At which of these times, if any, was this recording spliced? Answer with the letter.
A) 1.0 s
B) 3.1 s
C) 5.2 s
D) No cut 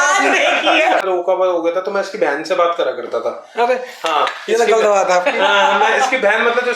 A